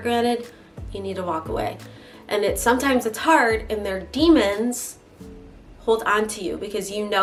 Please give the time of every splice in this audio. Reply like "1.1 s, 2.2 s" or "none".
none